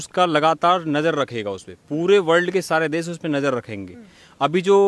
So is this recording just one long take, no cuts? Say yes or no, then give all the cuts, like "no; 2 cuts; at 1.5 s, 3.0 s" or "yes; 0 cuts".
yes; 0 cuts